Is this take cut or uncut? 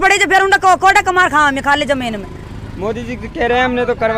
uncut